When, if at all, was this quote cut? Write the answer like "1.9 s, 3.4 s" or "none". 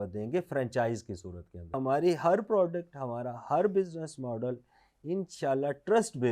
1.7 s